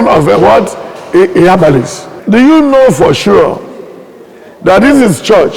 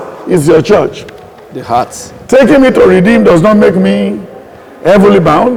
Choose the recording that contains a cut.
first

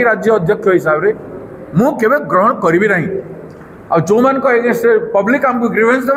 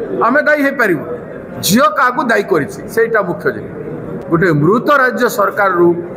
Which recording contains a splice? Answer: second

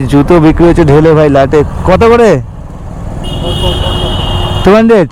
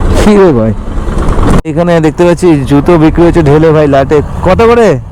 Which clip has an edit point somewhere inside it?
second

